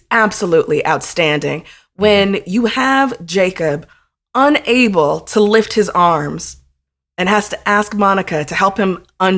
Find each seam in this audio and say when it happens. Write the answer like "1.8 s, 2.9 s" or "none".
none

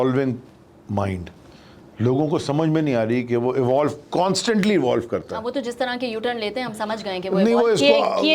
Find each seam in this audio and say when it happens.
none

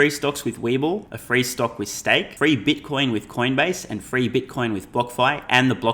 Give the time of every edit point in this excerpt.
1.1 s, 2.3 s

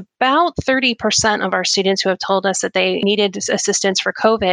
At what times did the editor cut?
3.0 s

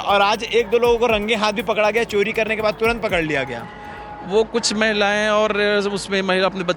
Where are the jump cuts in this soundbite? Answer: none

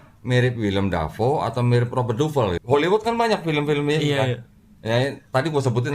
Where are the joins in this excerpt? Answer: 2.6 s

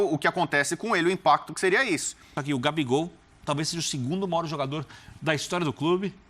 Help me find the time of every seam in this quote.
2.4 s

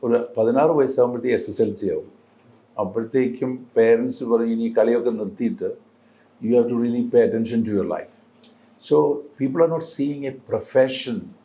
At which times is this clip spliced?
none

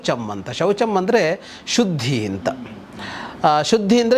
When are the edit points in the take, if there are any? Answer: none

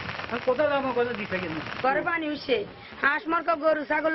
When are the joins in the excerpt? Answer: 1.7 s

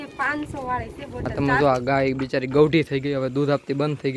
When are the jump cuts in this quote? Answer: 1.3 s

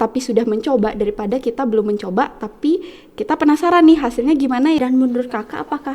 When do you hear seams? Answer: 4.8 s

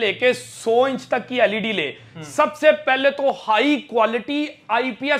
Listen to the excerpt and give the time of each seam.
none

